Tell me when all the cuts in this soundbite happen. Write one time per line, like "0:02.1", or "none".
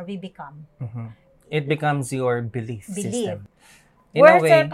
0:03.5